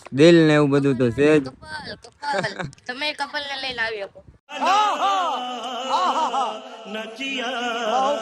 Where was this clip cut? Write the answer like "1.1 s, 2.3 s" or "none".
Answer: none